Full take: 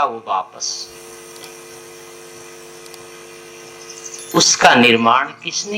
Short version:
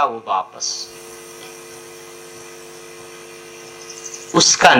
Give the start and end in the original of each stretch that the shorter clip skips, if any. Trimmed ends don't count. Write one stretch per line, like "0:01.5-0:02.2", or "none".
none